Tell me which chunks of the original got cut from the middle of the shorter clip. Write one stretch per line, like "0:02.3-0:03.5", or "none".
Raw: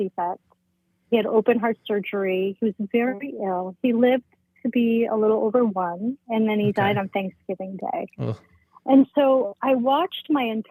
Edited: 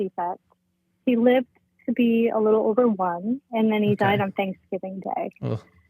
0:00.9-0:03.7